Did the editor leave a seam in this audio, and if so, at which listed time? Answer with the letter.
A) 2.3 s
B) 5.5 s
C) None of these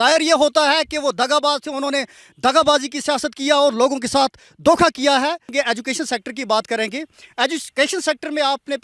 B